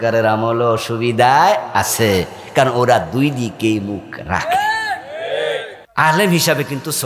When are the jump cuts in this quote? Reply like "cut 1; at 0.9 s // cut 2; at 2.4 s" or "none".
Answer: cut 1; at 5.8 s